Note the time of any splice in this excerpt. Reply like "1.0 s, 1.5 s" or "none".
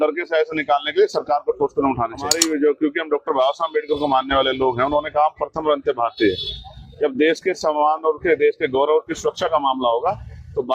2.4 s